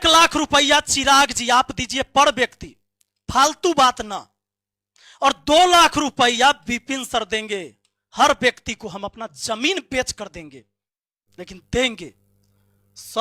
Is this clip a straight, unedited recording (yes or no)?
yes